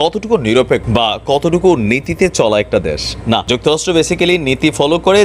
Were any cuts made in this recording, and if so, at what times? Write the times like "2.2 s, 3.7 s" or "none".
none